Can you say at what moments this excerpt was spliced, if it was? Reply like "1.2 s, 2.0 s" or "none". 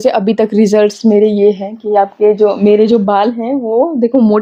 none

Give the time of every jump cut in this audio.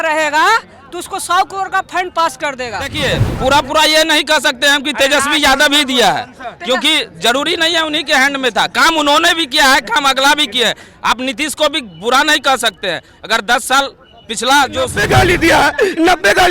3.0 s, 15.0 s

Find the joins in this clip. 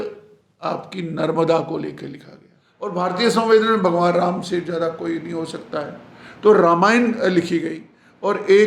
2.9 s

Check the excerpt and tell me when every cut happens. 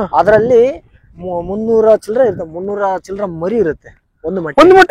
none

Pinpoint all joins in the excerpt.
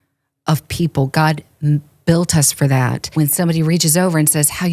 3.0 s

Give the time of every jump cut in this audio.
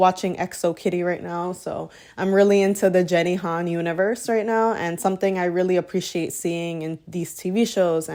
none

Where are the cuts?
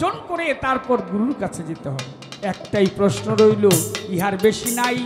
none

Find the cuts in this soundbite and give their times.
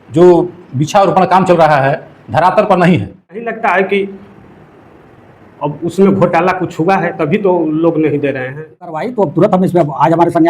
3.5 s, 8.9 s

